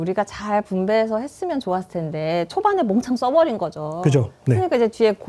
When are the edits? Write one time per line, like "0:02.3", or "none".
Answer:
none